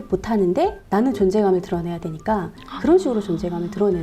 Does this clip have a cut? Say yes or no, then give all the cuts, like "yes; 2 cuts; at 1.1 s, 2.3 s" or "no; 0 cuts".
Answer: yes; 1 cut; at 2.7 s